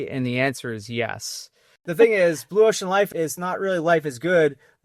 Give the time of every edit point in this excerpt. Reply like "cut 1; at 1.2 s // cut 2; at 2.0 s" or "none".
cut 1; at 1.8 s // cut 2; at 3.1 s